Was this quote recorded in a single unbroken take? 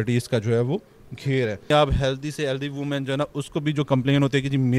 no; 1 cut; at 1.7 s

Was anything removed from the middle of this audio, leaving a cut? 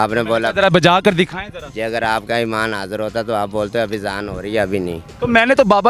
no; 0 cuts

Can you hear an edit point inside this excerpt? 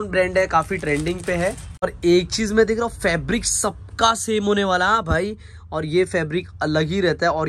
yes; 1 cut; at 1.8 s

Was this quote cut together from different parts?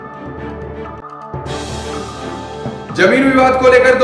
yes; 1 cut; at 2.8 s

